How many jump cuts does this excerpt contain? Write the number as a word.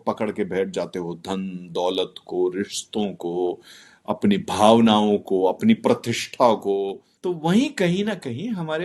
one